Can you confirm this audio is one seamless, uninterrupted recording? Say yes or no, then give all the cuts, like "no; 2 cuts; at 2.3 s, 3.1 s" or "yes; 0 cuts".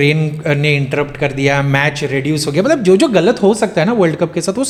yes; 0 cuts